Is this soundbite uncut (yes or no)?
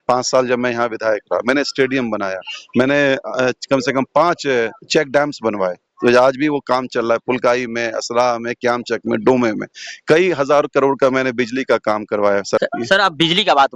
no